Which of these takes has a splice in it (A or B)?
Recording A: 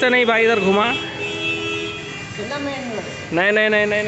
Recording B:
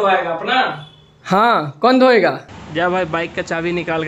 B